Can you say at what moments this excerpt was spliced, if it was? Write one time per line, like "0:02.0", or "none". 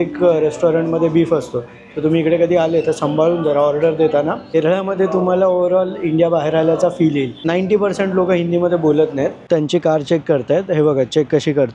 0:04.5
0:07.4
0:09.4